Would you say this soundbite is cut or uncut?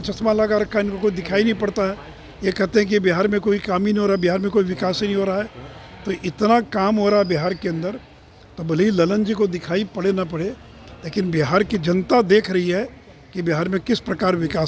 uncut